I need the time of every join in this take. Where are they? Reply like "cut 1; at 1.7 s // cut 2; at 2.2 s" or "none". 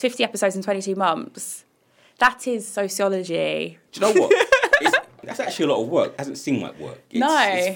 cut 1; at 3.8 s // cut 2; at 5.2 s // cut 3; at 6.2 s